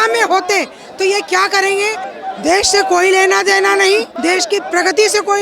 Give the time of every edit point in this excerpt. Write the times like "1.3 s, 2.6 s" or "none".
2.1 s, 4.1 s